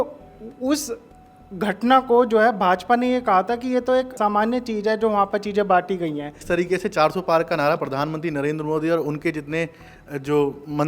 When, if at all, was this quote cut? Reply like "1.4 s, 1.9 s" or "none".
4.1 s, 6.4 s